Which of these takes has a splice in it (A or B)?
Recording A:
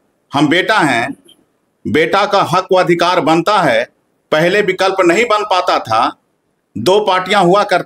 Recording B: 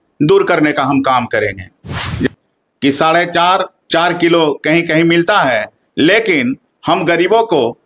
B